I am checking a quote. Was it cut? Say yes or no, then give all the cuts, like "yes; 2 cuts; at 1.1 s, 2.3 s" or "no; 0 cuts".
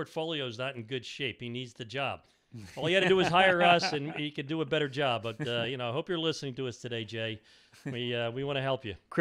no; 0 cuts